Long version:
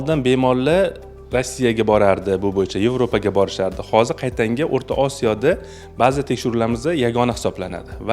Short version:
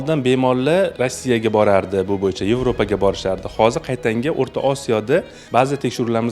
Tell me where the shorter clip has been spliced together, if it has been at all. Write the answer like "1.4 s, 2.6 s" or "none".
0.9 s, 5.4 s